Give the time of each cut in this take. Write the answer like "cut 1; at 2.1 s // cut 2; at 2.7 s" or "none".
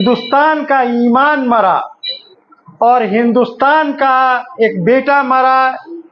none